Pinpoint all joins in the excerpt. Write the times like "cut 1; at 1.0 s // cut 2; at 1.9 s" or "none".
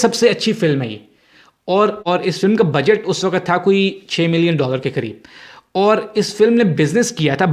cut 1; at 2.1 s